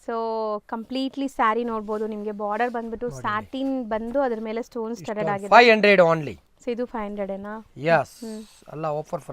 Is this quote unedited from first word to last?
yes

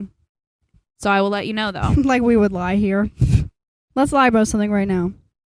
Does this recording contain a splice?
yes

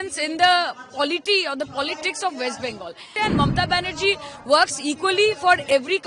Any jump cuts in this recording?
yes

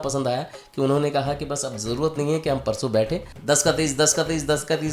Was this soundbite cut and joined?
yes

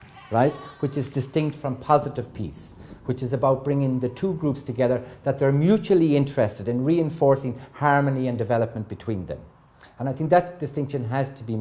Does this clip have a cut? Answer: no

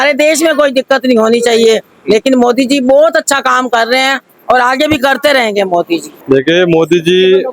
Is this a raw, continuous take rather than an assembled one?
no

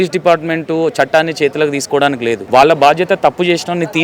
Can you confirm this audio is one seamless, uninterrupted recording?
no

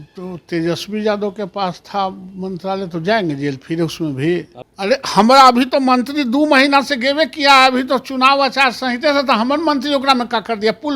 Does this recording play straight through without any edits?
no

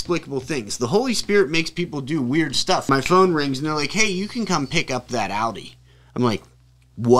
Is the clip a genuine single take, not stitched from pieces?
no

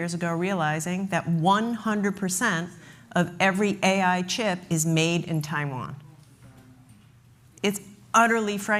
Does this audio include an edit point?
no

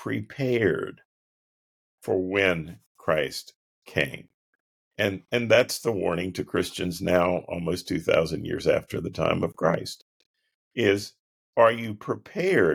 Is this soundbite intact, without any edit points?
yes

